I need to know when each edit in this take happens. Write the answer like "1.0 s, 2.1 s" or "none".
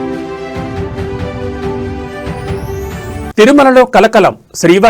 3.3 s